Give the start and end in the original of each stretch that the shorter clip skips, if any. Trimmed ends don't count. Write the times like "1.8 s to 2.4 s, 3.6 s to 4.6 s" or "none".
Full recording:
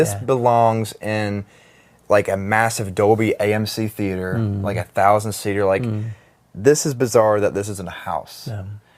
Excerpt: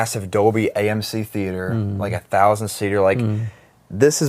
none